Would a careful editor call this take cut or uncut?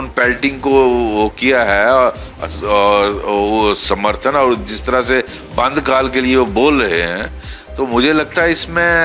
uncut